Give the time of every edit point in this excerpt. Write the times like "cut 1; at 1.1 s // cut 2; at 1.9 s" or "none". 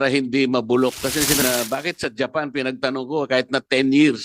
cut 1; at 1.4 s